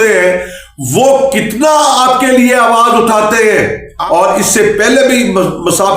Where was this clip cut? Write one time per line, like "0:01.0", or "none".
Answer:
0:03.9